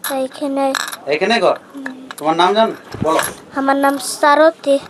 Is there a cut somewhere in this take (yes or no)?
no